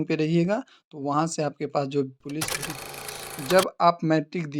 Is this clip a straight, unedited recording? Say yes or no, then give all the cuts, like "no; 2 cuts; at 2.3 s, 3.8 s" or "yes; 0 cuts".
no; 1 cut; at 2.9 s